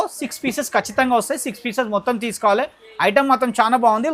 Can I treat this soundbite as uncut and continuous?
yes; 0 cuts

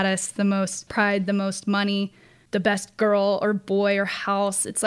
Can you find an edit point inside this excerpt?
yes; 2 cuts; at 0.8 s, 2.3 s

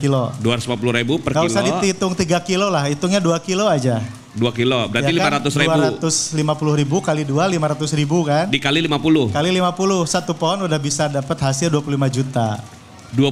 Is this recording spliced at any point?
no; 0 cuts

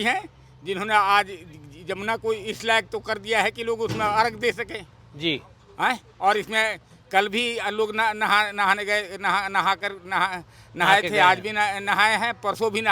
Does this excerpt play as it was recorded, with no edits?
yes; 0 cuts

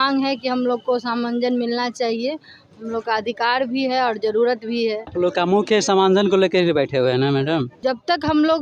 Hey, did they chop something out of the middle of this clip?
no; 0 cuts

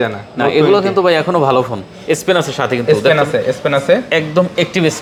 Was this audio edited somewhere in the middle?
no; 0 cuts

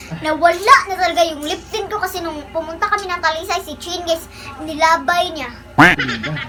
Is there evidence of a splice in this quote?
no; 0 cuts

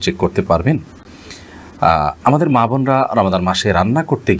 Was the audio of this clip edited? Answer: no; 0 cuts

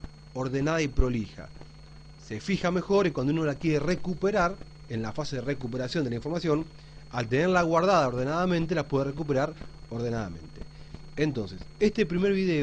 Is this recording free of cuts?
no; 1 cut; at 2.2 s

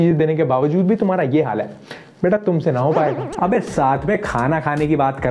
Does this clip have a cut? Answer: yes; 1 cut; at 3.3 s

